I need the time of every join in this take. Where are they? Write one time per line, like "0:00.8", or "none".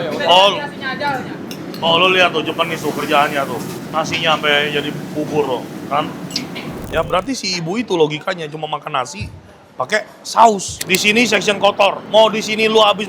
0:06.8
0:10.8
0:12.0